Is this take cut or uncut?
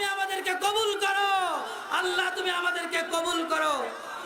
uncut